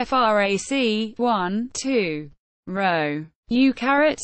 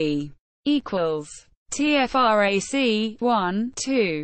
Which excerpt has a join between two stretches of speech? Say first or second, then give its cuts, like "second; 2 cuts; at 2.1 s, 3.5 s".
first; 1 cut; at 3.3 s